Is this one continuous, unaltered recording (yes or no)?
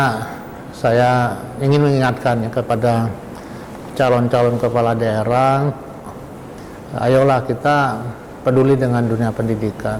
yes